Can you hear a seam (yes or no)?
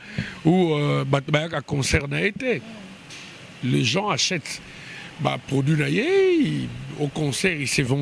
no